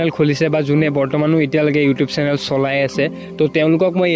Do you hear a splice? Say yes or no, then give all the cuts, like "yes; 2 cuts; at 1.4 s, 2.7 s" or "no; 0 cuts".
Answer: no; 0 cuts